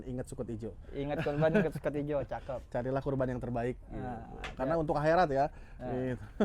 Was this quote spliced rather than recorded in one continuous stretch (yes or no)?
no